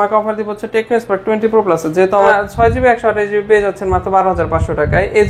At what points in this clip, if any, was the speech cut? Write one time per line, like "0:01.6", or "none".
0:02.3